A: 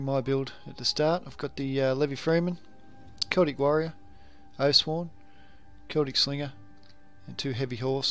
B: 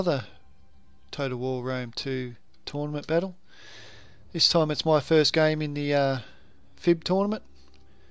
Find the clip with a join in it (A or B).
A